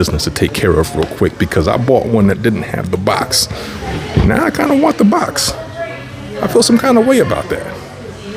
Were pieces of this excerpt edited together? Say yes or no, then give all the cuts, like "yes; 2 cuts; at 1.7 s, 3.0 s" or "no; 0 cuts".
no; 0 cuts